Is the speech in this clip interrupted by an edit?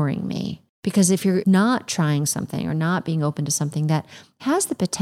yes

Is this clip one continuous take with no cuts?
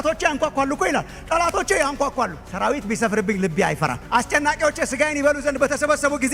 yes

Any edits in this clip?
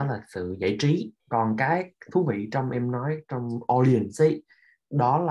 yes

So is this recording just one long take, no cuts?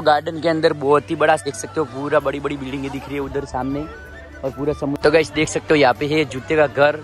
no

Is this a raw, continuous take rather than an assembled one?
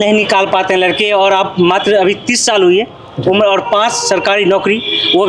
yes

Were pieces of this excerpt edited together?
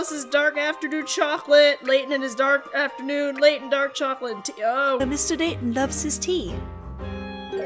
no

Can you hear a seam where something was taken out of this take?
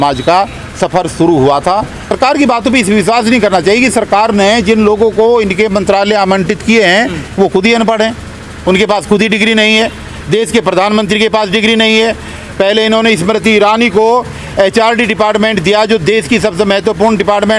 yes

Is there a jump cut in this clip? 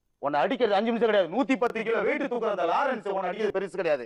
no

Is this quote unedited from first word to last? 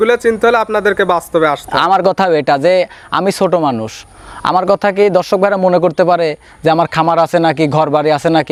yes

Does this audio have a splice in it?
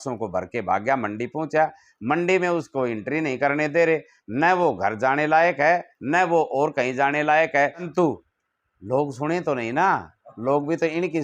yes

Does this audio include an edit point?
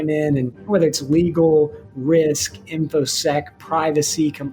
no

